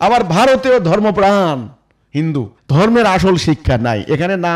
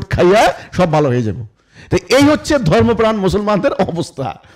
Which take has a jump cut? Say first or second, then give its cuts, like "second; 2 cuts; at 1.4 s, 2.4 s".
first; 1 cut; at 2.6 s